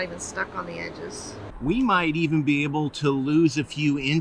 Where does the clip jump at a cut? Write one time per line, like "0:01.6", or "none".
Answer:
0:01.4